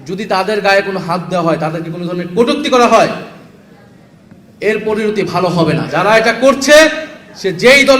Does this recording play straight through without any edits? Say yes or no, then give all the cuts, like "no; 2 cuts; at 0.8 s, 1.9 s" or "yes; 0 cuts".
no; 1 cut; at 5.9 s